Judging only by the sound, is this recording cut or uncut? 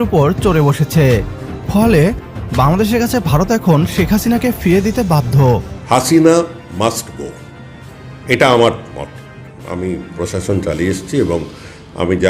cut